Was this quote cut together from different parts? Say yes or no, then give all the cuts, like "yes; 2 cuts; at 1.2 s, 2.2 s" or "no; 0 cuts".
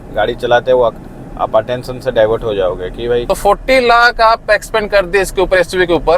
yes; 1 cut; at 3.2 s